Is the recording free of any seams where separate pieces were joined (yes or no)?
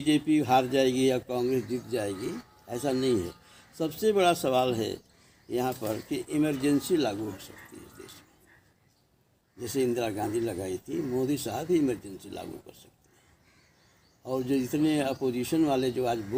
yes